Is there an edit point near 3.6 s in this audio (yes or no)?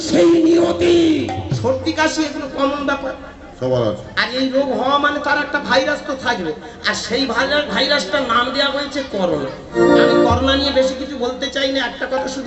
no